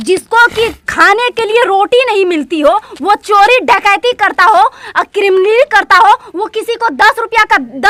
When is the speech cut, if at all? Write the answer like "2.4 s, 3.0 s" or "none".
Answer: none